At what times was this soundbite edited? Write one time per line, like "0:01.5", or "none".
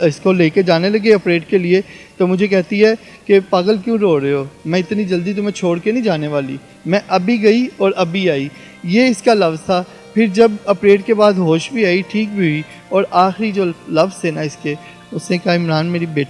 none

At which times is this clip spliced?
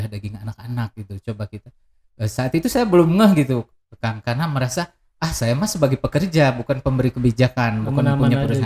none

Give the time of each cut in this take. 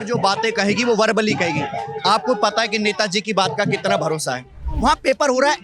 0:04.6

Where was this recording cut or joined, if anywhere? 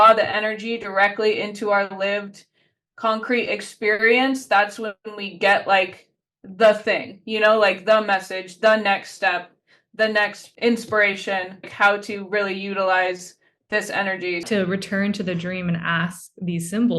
0:10.4
0:11.7
0:14.4

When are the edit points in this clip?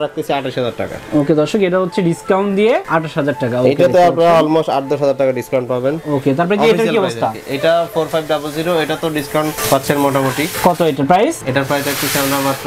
none

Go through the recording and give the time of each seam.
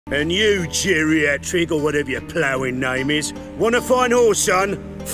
none

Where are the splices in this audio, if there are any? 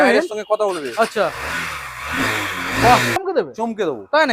0:03.2

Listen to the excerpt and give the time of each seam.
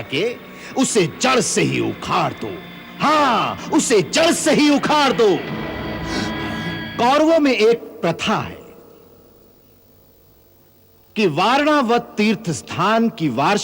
0:06.9

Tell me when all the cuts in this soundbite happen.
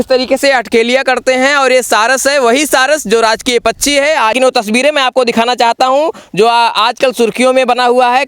0:04.3

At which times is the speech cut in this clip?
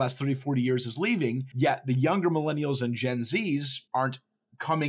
0:01.5
0:03.8

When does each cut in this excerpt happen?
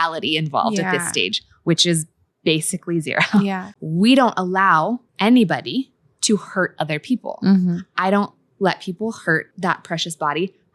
0:03.7
0:05.0
0:09.5

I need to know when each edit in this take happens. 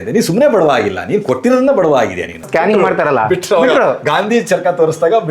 0:02.5

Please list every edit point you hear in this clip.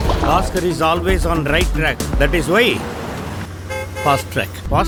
none

